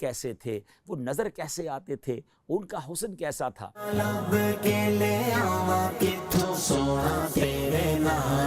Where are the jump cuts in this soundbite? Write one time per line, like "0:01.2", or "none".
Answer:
0:03.9